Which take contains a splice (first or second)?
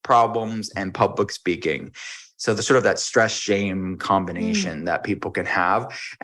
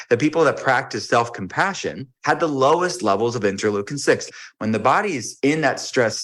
second